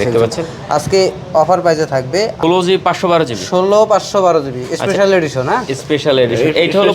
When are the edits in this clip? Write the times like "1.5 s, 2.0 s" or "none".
2.3 s